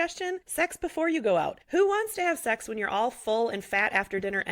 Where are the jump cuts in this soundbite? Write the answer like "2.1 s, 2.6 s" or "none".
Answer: 1.6 s